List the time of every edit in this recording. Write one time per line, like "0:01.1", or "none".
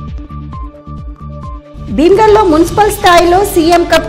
none